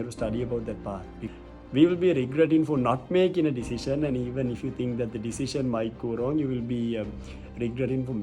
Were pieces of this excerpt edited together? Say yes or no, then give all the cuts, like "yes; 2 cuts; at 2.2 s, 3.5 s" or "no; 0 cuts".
yes; 1 cut; at 1.2 s